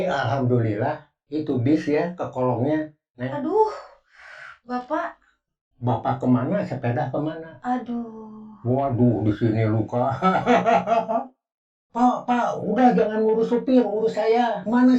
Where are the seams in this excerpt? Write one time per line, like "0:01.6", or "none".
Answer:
0:11.3